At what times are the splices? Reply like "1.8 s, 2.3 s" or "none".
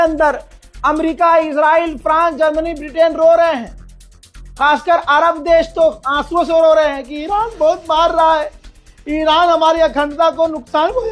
none

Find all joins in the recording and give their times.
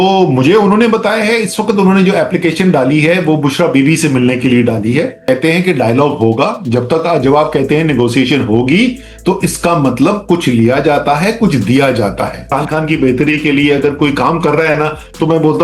5.2 s, 12.5 s

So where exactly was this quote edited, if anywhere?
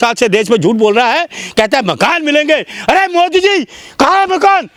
none

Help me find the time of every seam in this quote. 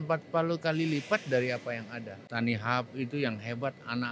2.2 s

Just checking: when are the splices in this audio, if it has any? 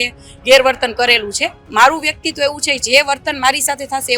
1.6 s

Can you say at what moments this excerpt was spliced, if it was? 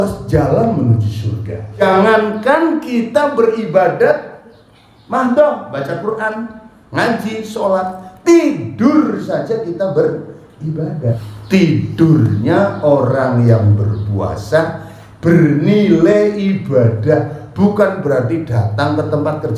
1.7 s, 11.3 s

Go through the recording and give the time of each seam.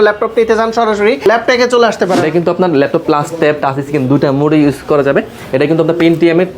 1.2 s, 2.2 s

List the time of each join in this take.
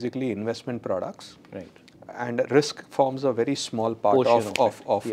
none

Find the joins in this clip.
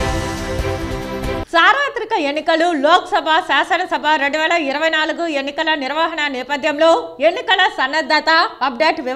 1.4 s

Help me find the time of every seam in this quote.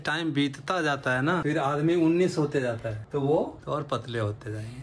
3.0 s, 3.6 s

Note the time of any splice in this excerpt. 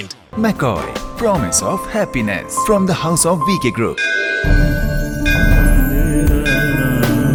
none

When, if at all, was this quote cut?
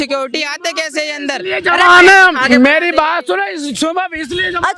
none

